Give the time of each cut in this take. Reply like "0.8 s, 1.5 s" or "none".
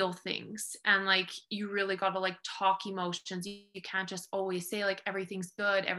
none

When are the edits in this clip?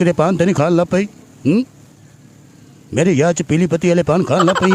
none

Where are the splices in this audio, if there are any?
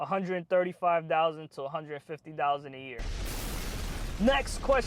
none

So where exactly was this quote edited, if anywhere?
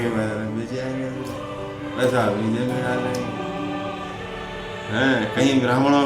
3.2 s, 4.6 s

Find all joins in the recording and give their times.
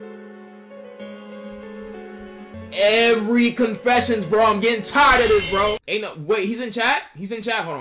2.5 s, 5.8 s

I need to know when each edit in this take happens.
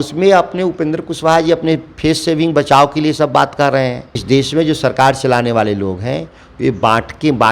4.2 s

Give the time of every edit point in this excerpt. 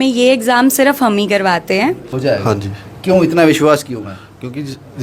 2.1 s

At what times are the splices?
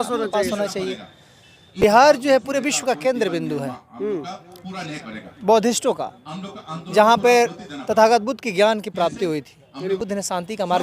1.8 s, 10.0 s

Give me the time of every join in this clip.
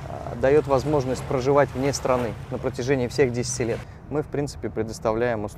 3.9 s

